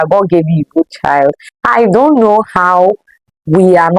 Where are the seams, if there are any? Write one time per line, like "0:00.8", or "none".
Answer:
0:01.5